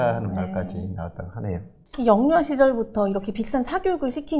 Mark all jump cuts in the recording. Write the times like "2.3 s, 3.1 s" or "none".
none